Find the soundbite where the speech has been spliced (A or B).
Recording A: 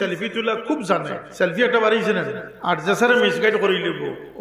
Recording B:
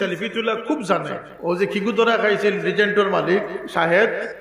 B